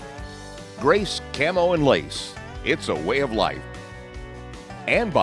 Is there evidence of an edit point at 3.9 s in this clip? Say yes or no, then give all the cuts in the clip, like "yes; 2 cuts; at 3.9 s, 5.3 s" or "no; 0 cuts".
no; 0 cuts